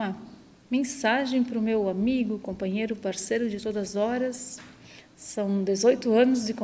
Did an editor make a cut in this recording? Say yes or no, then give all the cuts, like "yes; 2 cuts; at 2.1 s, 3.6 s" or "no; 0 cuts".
no; 0 cuts